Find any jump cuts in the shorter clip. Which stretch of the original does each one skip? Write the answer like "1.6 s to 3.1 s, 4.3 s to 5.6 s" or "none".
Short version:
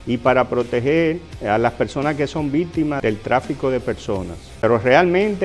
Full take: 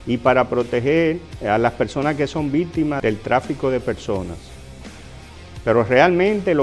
4.4 s to 5.5 s